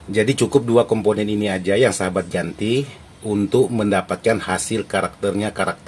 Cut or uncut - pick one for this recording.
uncut